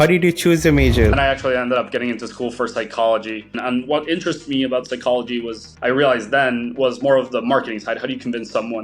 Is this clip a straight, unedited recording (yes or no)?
no